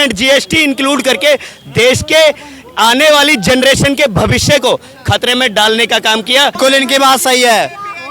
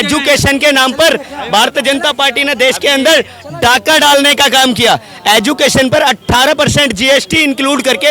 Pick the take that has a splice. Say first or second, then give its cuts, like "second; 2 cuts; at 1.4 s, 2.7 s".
first; 1 cut; at 6.6 s